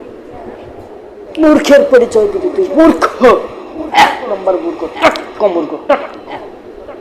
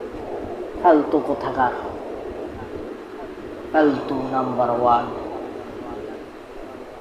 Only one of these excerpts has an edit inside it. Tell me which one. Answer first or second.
first